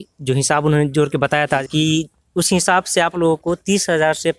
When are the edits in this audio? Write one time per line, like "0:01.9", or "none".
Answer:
0:01.6